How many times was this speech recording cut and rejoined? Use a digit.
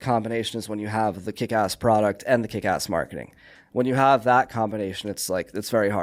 0